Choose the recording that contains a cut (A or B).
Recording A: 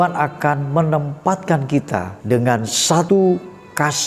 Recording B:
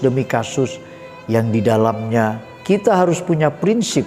A